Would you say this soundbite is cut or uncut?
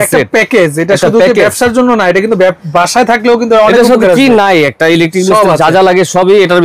uncut